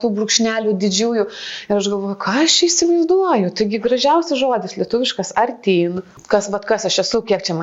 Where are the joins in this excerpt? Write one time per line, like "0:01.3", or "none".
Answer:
0:06.1